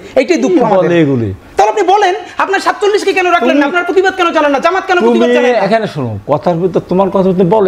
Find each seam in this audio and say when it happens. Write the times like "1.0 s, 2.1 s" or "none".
1.4 s